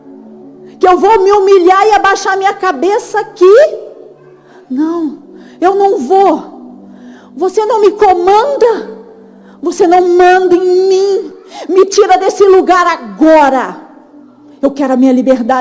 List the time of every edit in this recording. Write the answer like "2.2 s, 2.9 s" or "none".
none